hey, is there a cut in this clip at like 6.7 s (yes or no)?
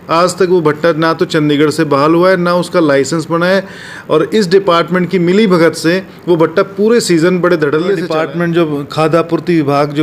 no